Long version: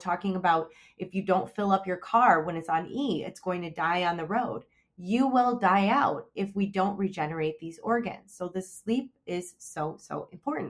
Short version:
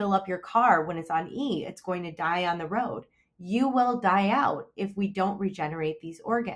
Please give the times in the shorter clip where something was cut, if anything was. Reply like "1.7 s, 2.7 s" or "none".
none